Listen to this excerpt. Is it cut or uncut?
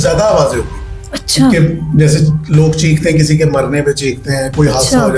uncut